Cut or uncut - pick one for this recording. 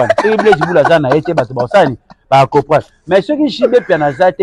uncut